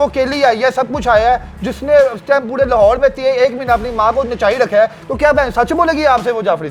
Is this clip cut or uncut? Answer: uncut